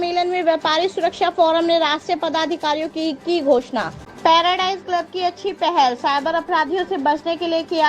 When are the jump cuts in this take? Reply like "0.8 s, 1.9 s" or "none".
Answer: 4.0 s